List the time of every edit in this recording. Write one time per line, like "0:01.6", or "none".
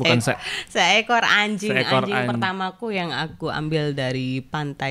none